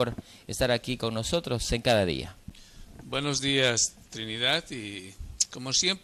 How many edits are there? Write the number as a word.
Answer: one